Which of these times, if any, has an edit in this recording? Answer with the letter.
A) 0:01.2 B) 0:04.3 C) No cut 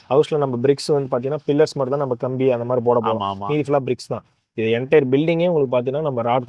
C